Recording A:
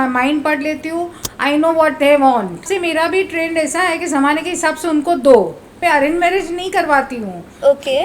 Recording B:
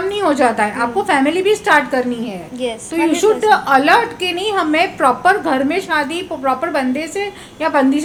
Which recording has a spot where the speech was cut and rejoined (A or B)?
A